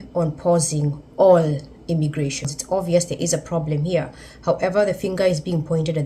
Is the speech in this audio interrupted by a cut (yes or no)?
yes